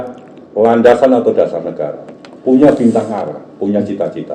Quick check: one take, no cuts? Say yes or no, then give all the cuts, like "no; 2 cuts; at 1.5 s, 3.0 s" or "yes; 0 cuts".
yes; 0 cuts